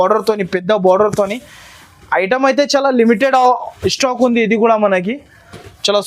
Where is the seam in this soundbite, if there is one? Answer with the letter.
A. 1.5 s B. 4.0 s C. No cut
C